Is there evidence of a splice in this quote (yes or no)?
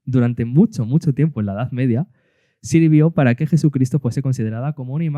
no